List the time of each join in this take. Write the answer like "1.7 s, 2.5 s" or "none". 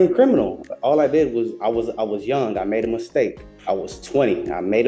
3.5 s